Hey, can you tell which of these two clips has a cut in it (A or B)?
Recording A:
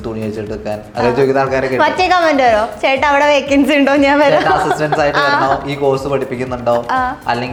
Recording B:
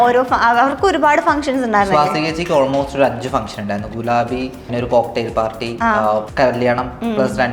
B